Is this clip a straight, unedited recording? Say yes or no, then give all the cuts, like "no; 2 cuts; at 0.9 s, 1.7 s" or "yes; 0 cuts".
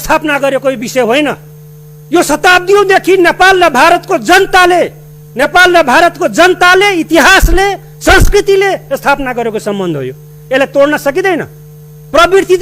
yes; 0 cuts